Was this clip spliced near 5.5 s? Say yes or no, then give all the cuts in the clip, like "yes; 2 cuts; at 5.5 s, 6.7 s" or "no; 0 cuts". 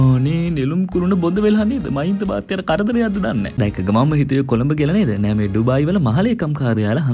no; 1 cut; at 3.5 s